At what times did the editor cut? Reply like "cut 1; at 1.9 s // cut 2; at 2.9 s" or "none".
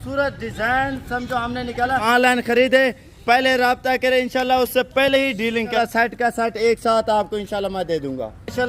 cut 1; at 2.0 s // cut 2; at 5.8 s